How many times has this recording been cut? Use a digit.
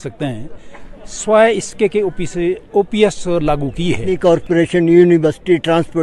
1